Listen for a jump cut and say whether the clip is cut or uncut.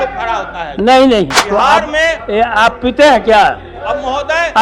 cut